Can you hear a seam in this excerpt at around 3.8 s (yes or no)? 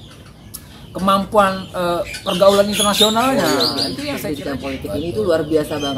yes